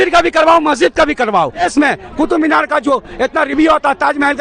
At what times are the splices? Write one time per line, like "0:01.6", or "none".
0:01.7